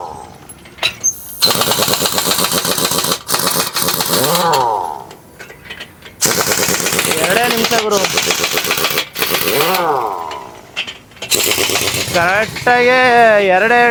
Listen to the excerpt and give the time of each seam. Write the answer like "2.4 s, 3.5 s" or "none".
none